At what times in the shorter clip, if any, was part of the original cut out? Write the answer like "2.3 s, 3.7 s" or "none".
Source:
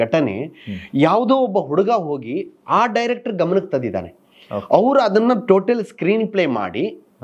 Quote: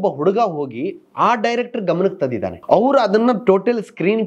2.6 s